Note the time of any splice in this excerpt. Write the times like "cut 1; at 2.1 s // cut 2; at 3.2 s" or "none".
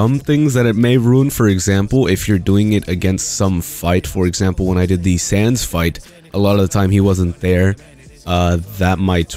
none